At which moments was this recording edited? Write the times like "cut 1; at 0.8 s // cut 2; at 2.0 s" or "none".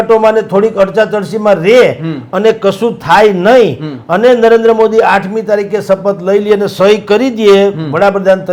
none

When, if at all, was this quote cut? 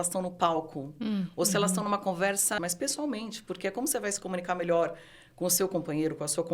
cut 1; at 2.6 s

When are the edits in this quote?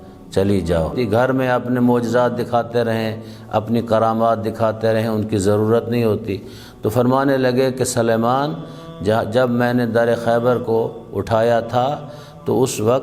cut 1; at 0.9 s

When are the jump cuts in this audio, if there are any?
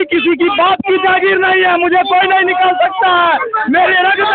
none

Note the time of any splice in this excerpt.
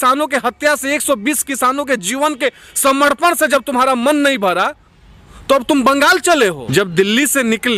cut 1; at 6.6 s

